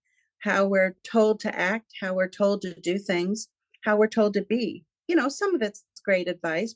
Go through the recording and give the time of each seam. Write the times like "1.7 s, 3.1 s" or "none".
4.9 s